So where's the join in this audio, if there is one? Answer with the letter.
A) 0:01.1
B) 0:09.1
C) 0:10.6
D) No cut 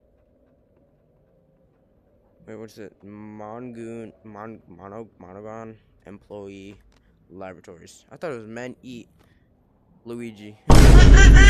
C